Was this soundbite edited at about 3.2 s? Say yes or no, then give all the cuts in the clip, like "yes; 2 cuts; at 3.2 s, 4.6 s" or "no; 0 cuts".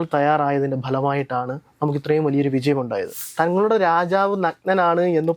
yes; 1 cut; at 3.2 s